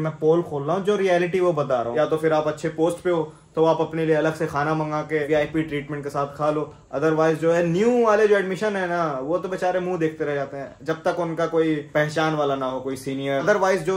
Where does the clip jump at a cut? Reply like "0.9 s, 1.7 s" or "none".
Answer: none